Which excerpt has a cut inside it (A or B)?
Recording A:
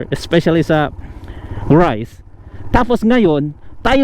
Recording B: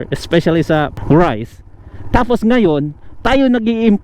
B